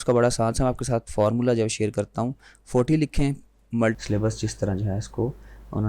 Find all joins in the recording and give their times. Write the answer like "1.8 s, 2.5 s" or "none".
3.9 s